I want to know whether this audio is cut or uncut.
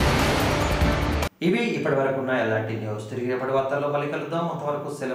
uncut